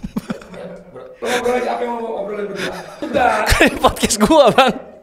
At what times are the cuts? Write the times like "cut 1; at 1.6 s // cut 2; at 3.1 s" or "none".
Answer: cut 1; at 1.1 s // cut 2; at 3.1 s